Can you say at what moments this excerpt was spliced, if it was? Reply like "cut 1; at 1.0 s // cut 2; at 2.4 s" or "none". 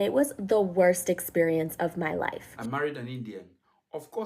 cut 1; at 2.5 s